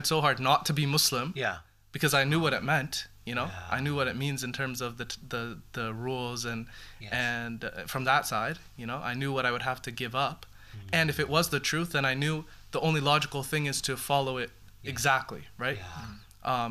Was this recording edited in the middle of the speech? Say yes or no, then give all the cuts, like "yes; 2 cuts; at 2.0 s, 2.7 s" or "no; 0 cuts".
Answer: no; 0 cuts